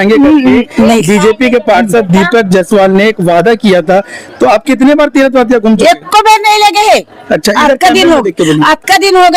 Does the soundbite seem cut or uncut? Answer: uncut